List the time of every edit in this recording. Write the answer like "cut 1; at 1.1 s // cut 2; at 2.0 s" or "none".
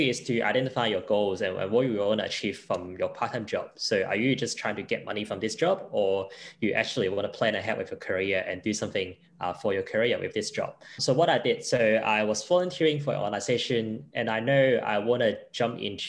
cut 1; at 10.9 s